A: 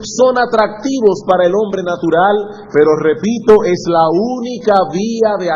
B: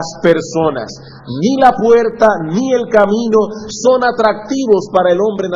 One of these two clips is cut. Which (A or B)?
B